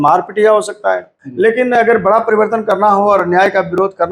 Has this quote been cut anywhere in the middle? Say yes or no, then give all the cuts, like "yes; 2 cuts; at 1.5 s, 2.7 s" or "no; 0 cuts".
yes; 1 cut; at 1.2 s